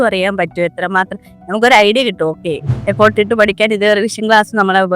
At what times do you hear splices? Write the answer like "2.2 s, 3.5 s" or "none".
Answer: 2.6 s